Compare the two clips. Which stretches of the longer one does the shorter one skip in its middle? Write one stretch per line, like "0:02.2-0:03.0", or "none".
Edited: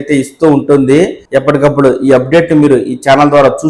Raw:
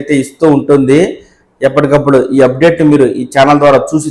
0:01.2-0:01.5

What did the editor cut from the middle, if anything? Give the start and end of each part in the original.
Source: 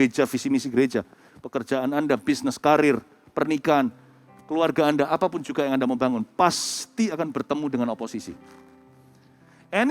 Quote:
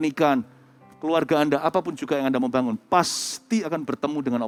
none

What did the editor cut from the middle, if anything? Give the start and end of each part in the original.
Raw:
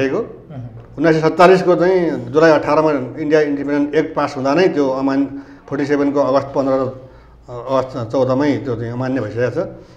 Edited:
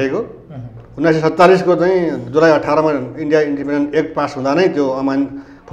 none

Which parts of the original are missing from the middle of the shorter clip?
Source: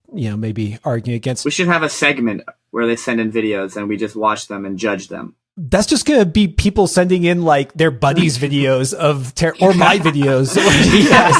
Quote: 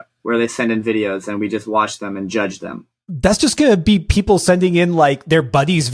none

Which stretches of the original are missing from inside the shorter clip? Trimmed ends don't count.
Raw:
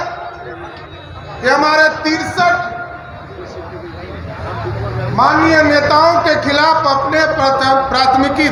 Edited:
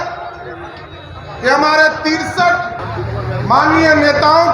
0:02.8-0:04.5

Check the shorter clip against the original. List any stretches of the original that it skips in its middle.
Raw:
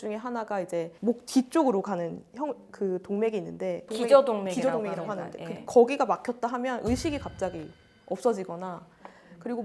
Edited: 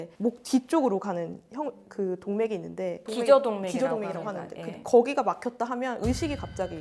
none

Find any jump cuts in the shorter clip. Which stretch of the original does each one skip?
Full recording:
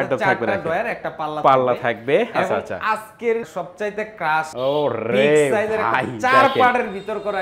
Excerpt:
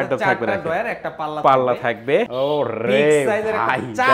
0:02.3-0:04.5

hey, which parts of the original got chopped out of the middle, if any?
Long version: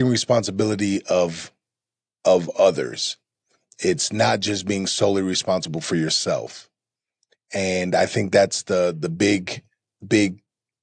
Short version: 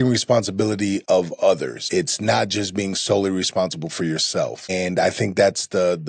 0:01.0-0:02.2
0:03.0-0:03.7
0:06.6-0:07.7

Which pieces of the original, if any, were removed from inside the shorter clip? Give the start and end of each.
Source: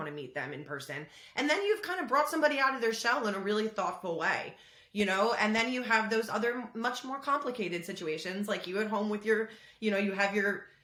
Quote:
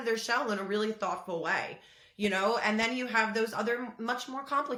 none

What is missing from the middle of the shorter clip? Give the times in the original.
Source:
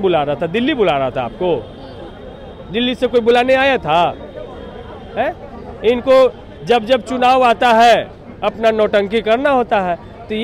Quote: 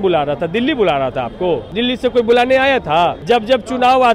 0:01.7-0:02.7
0:04.2-0:06.6

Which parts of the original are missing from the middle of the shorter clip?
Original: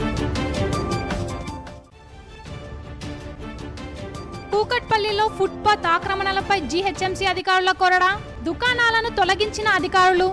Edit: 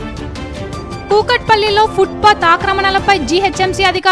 0:01.1-0:04.5

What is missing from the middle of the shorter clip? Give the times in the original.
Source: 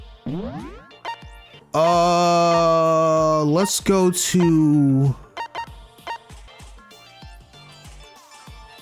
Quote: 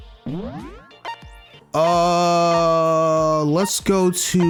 none

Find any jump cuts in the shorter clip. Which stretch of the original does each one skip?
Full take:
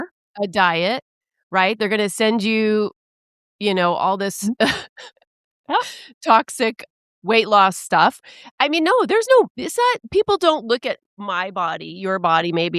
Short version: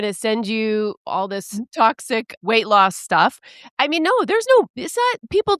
0:03.5-0:06.0
0:06.8-0:07.1

